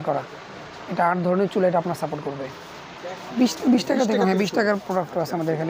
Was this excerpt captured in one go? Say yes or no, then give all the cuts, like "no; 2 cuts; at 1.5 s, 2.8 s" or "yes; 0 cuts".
no; 1 cut; at 3.4 s